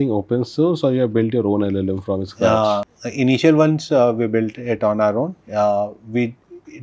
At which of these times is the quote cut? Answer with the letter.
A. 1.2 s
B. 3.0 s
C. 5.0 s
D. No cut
B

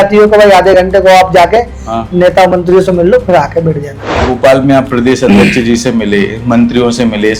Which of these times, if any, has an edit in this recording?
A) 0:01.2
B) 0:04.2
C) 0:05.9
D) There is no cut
B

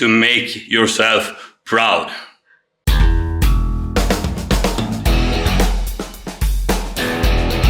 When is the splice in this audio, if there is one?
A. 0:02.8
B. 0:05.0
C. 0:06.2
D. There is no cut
A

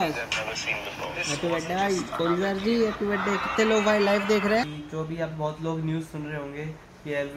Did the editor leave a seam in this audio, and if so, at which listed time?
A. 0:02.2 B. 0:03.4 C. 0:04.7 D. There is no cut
C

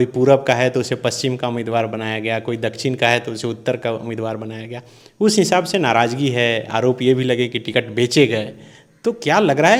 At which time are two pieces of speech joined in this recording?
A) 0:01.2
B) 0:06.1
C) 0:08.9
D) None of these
D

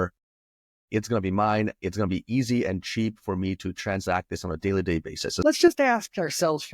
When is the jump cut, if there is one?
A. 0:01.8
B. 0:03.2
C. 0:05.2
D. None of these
C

